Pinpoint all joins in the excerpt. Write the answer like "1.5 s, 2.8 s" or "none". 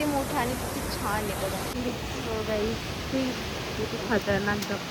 1.7 s